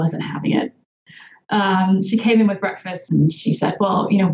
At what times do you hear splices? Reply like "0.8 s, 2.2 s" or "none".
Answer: 3.0 s